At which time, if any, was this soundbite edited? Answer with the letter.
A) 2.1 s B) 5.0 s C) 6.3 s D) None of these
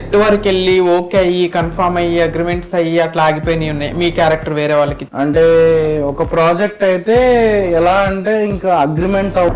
B